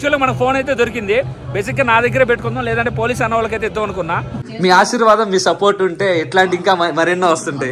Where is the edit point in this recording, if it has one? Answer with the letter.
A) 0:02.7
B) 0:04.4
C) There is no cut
B